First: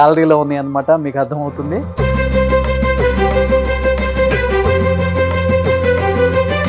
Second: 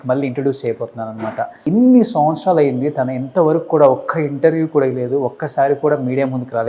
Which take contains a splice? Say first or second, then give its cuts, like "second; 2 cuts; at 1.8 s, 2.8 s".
second; 1 cut; at 1.6 s